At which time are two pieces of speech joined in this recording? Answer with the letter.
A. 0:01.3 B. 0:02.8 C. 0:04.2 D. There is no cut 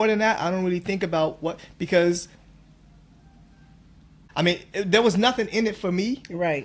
C